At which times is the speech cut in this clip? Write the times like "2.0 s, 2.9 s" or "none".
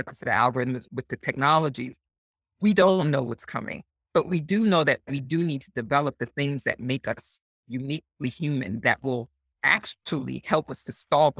0.9 s